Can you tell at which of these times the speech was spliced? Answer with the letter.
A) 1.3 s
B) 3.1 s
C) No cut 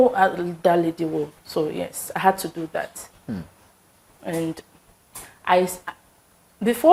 C